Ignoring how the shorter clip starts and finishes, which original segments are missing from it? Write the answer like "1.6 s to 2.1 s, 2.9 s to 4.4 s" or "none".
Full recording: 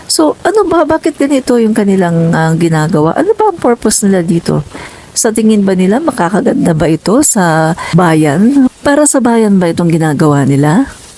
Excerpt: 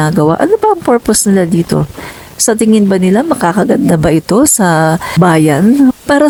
none

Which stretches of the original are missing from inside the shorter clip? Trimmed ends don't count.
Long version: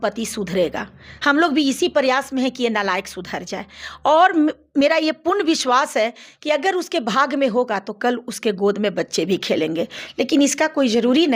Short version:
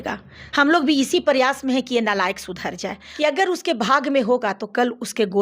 3.7 s to 6.3 s

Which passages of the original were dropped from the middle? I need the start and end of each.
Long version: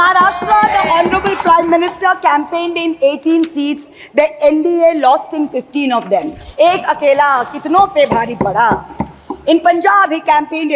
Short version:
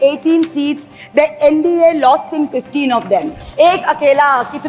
none

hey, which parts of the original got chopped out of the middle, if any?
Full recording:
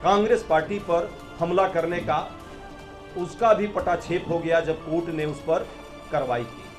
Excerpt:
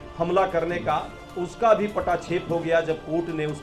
2.4 s to 3.0 s

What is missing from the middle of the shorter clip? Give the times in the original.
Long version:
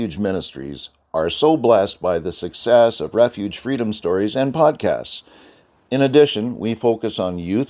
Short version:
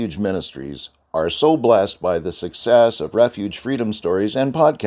none

